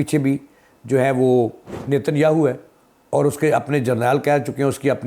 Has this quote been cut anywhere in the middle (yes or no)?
yes